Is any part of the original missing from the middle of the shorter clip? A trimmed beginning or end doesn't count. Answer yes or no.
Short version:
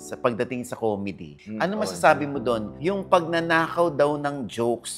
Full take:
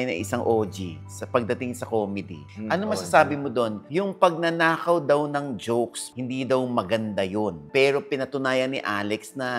no